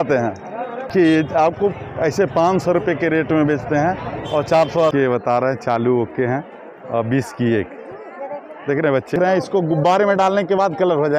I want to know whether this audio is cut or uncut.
cut